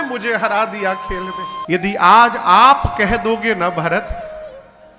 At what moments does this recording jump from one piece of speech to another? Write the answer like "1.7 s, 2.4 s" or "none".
1.6 s